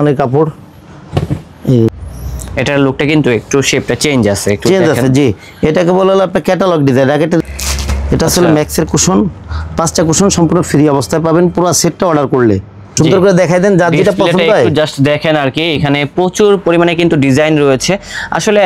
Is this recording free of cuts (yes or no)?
no